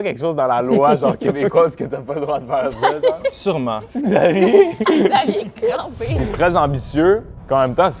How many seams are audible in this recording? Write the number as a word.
two